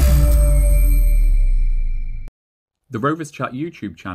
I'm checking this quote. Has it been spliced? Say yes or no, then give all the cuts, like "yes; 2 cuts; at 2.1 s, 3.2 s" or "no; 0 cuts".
yes; 1 cut; at 2.9 s